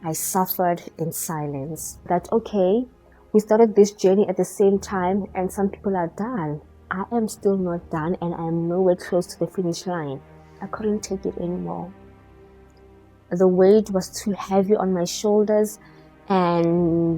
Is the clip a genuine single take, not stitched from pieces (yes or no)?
no